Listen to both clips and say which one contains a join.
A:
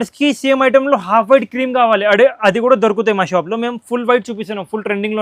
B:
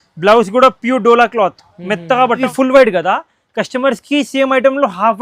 B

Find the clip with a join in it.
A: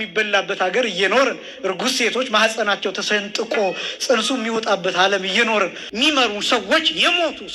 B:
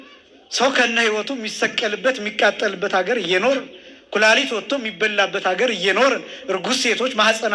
A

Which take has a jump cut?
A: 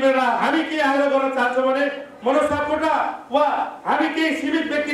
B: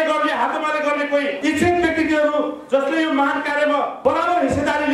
B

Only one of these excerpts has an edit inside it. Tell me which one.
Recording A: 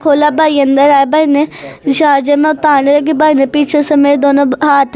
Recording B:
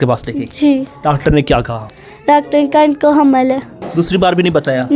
B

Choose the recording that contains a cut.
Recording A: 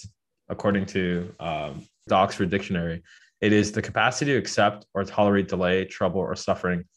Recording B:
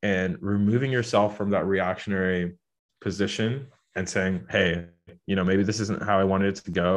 A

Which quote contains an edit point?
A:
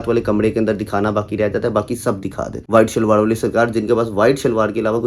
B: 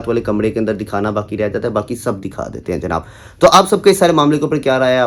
A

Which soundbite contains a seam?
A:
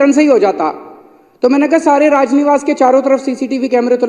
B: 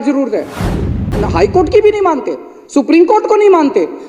B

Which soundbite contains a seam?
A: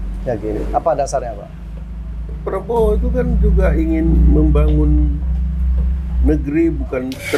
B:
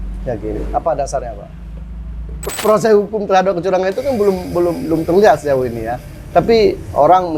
B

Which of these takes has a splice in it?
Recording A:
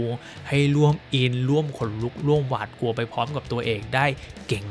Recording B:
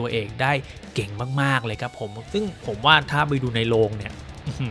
B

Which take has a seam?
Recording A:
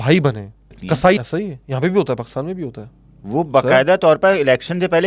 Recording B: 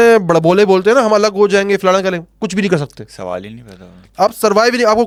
A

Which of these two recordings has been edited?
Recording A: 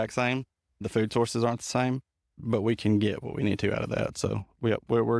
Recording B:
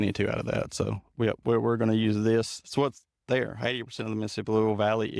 A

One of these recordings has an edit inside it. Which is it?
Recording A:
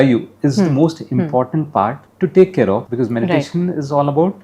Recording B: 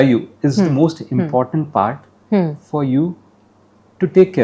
A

